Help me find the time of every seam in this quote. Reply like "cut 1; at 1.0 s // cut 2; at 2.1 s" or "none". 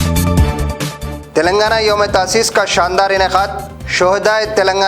cut 1; at 1.1 s